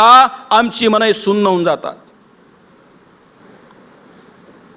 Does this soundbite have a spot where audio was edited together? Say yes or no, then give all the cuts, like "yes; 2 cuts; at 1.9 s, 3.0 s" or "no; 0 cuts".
yes; 1 cut; at 3.4 s